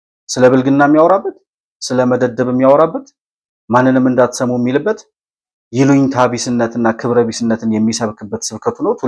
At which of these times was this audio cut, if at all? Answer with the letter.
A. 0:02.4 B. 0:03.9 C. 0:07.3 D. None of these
D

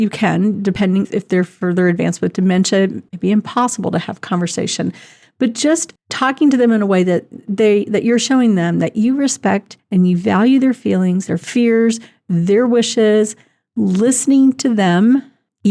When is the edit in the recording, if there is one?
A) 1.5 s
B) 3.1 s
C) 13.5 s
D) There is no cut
B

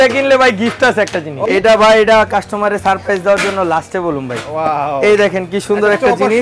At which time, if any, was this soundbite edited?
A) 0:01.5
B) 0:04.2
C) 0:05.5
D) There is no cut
A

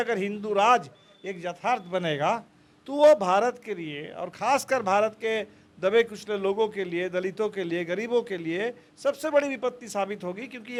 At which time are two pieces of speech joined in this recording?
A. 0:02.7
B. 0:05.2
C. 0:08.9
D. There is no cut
D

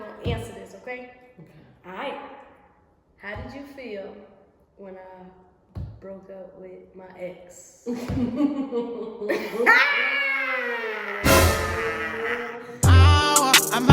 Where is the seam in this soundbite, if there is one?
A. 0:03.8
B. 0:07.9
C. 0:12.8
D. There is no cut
C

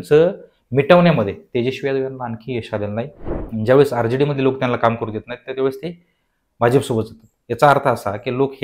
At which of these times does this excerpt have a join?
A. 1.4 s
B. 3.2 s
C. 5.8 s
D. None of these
B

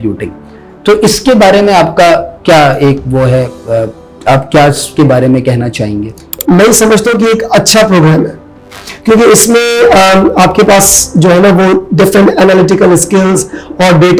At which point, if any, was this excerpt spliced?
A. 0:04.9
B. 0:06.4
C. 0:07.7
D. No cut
B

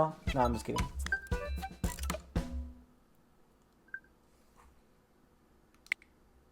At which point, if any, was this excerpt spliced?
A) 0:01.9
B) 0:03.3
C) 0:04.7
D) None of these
D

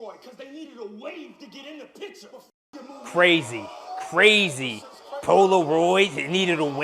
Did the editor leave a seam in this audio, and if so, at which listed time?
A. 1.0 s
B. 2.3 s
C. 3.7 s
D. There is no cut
D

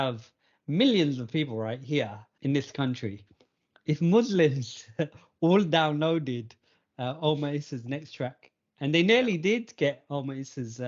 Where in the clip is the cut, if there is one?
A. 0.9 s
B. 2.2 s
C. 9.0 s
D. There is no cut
B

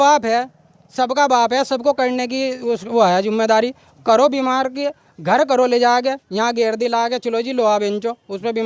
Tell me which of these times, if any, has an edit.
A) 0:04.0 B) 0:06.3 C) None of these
C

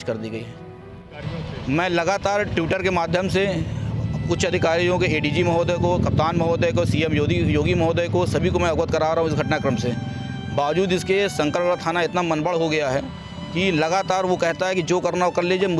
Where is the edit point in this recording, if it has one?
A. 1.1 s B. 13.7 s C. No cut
A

